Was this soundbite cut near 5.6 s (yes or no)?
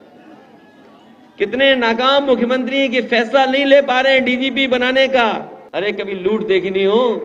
yes